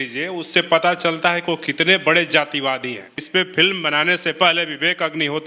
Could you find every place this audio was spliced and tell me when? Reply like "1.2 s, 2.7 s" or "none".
3.2 s